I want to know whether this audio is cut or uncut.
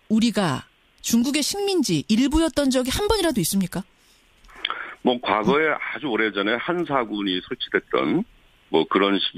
cut